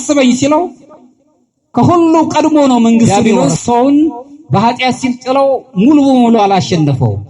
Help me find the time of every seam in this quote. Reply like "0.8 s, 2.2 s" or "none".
3.1 s